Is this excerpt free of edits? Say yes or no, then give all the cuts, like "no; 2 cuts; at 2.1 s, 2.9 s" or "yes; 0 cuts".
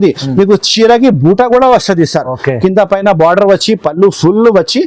yes; 0 cuts